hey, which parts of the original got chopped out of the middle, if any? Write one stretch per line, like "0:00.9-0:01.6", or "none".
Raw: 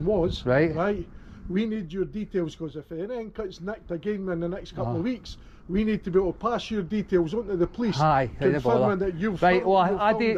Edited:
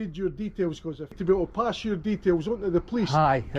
0:02.9-0:06.0